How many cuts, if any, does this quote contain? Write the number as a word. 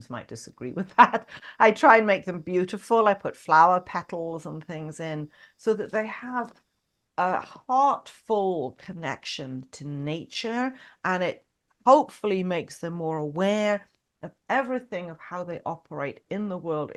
zero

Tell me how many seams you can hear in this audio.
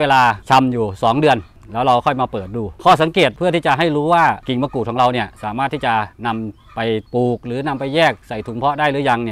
zero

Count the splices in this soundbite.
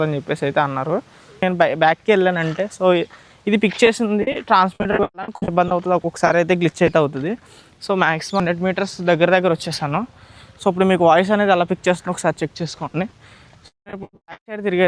two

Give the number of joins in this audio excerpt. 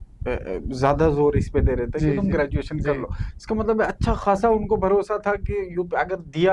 zero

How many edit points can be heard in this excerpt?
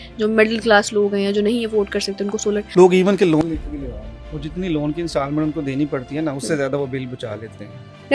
one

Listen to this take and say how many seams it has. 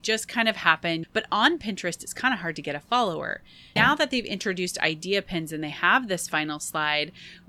two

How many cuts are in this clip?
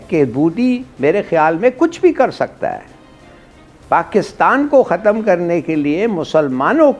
zero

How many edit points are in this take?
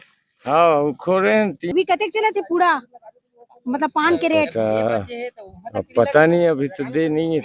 one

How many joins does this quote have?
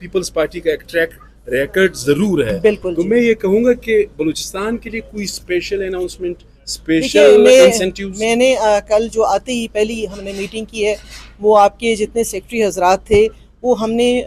zero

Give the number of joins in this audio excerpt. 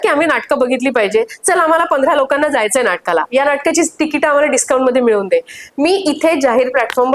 zero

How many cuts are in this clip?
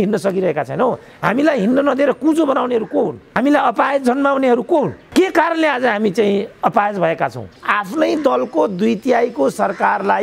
three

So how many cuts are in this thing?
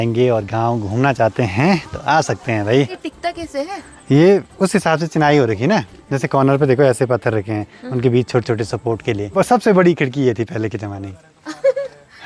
zero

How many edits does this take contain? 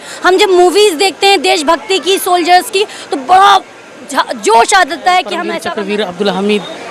one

